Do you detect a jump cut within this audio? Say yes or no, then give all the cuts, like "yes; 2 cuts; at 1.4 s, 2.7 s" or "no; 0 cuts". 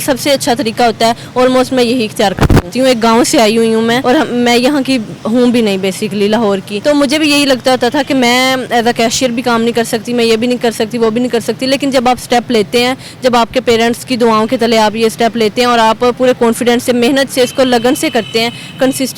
yes; 3 cuts; at 2.7 s, 4.0 s, 6.7 s